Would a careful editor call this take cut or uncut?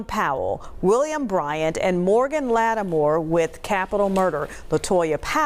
uncut